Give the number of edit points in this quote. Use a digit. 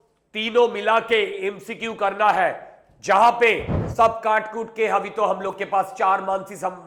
1